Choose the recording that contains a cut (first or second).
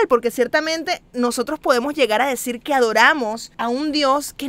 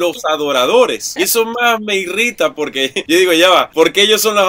second